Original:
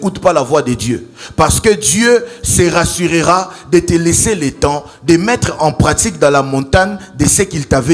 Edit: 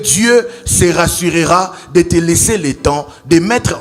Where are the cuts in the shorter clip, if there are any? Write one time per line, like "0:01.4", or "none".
none

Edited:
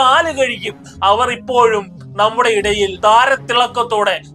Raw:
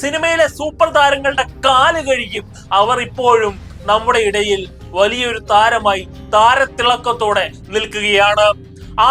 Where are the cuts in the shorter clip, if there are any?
0:02.9

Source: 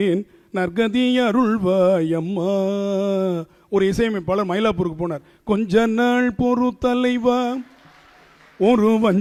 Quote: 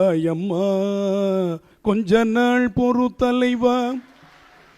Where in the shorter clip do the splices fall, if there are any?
0:01.7

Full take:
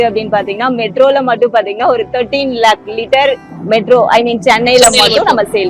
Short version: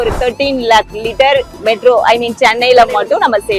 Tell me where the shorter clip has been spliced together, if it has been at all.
0:01.5

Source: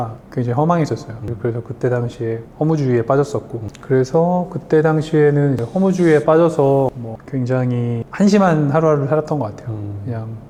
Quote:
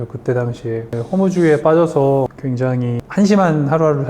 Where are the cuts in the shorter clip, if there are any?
0:01.0
0:02.8

